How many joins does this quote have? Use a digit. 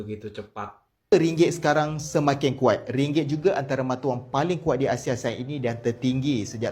1